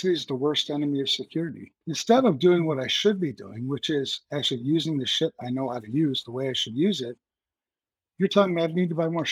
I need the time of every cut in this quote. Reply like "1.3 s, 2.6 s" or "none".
1.7 s